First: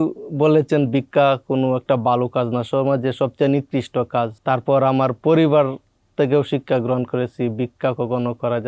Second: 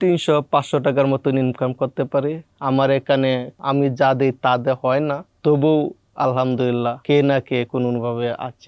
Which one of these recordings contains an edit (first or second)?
second